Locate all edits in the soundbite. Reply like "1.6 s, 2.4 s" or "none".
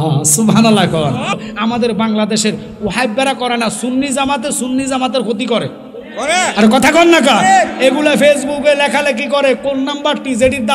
1.4 s